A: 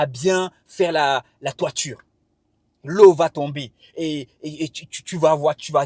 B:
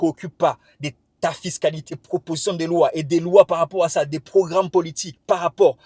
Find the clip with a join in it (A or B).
B